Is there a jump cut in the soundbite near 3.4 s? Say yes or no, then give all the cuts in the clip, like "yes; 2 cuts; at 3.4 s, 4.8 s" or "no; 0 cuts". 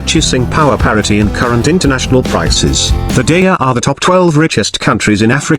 yes; 1 cut; at 3.4 s